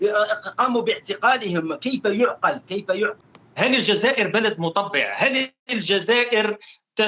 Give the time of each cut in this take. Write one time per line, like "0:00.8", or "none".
0:03.2